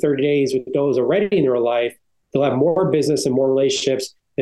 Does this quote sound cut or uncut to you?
uncut